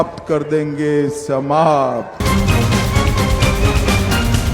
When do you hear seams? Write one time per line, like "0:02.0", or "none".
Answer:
0:02.2